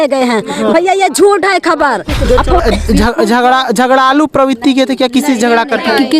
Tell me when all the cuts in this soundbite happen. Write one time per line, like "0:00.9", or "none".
0:02.6